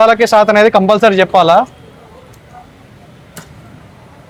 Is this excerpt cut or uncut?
uncut